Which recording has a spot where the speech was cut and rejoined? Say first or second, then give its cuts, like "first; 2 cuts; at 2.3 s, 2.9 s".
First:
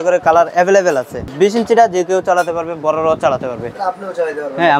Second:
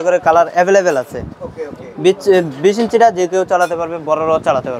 first; 1 cut; at 1.3 s